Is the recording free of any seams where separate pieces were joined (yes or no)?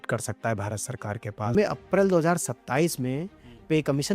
no